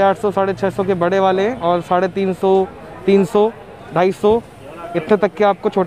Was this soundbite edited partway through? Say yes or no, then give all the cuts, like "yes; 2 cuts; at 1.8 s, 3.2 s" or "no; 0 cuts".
no; 0 cuts